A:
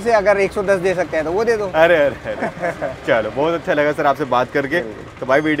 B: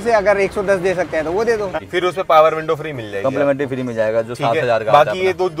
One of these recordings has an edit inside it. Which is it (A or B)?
B